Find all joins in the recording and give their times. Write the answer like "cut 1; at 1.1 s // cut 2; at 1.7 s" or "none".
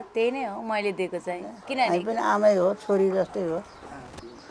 cut 1; at 1.9 s